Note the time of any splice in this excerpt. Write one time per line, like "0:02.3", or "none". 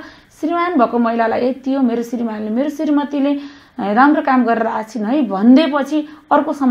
none

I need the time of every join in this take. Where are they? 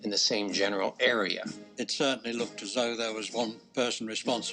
0:01.6
0:03.6

